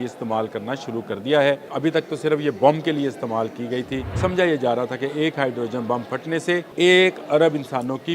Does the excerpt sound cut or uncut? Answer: cut